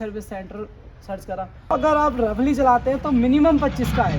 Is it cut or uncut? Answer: cut